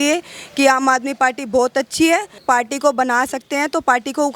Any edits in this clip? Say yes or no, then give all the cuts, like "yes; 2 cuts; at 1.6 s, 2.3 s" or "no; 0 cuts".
yes; 1 cut; at 2.4 s